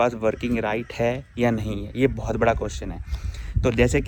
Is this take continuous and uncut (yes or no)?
yes